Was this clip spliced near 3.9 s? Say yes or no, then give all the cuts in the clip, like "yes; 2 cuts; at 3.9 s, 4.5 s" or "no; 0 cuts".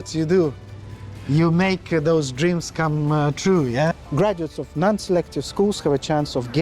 yes; 1 cut; at 3.9 s